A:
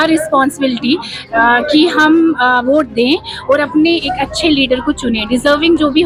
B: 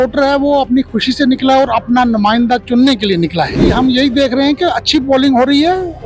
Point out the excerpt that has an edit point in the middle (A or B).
B